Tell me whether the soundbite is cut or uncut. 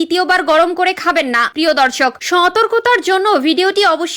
cut